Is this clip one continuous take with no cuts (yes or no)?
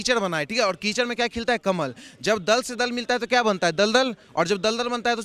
yes